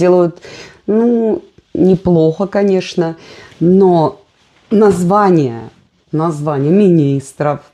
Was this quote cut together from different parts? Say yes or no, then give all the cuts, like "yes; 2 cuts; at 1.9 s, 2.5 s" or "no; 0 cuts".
no; 0 cuts